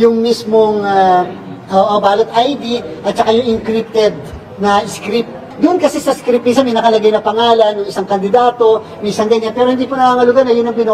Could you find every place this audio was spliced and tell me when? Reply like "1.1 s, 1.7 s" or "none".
5.5 s